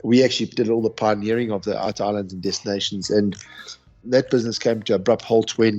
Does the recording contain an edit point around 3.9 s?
yes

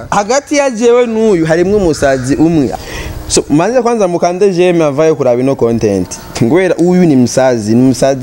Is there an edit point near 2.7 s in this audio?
yes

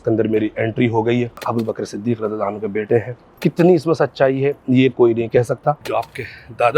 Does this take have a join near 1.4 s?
yes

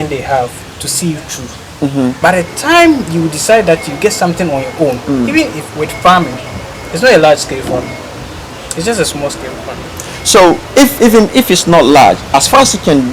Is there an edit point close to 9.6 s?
no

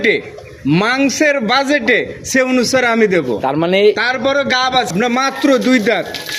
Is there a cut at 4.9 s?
yes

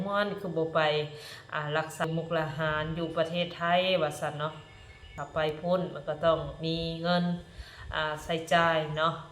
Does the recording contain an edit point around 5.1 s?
yes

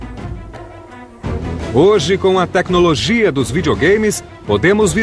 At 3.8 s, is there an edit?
no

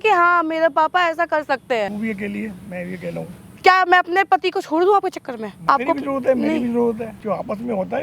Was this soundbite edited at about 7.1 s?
yes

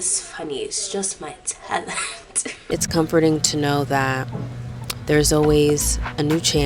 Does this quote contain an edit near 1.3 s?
no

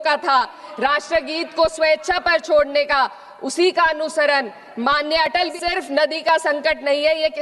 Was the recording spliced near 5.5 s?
yes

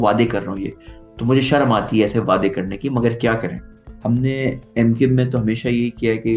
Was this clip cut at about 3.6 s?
yes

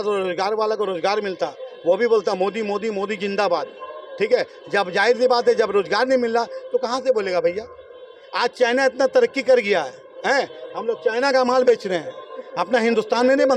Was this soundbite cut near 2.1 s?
no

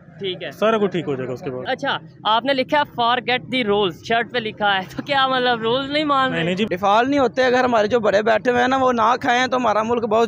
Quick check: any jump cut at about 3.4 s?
no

